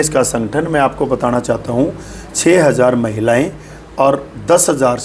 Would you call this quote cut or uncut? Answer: uncut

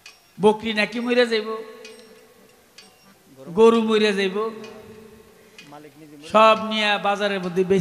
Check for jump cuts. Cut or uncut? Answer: uncut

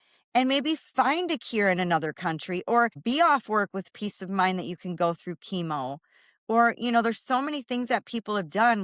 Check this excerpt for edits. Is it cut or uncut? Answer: cut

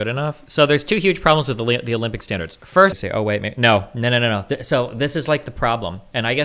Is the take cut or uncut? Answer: cut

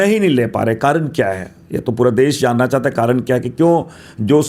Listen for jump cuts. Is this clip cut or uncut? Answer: uncut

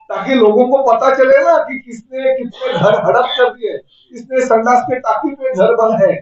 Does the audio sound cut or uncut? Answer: uncut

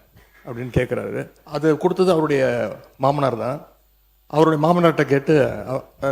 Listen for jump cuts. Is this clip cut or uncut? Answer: cut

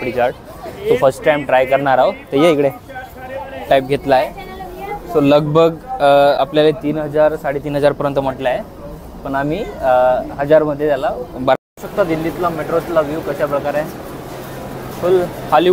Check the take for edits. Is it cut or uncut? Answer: cut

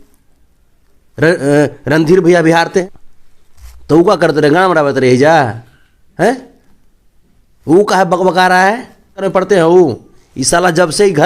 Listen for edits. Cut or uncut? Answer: cut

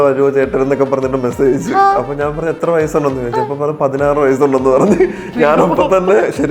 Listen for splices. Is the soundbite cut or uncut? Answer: uncut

